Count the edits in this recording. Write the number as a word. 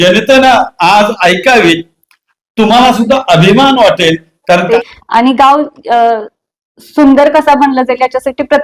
one